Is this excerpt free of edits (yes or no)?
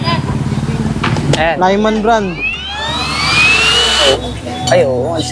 no